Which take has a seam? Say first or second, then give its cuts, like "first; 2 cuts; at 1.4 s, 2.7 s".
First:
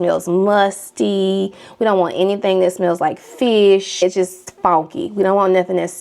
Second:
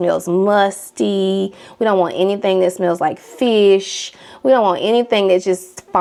first; 1 cut; at 4.0 s